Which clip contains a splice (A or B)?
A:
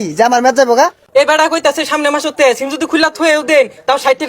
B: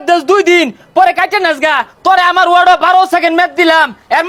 A